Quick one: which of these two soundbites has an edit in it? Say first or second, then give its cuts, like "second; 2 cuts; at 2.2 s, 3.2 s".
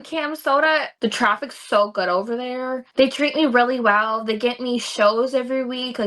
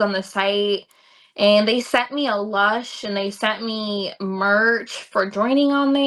first; 2 cuts; at 0.9 s, 2.9 s